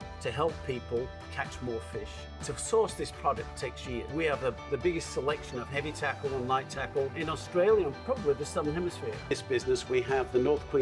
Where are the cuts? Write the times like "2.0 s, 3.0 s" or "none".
2.2 s, 4.1 s, 7.1 s, 8.0 s, 9.3 s